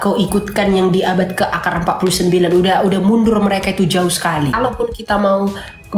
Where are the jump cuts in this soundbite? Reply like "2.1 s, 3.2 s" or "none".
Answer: 4.5 s